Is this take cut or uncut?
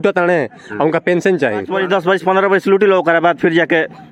cut